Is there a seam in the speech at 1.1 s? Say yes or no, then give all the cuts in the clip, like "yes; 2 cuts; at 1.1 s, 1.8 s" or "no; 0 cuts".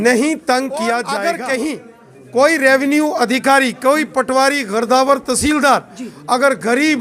yes; 1 cut; at 1.1 s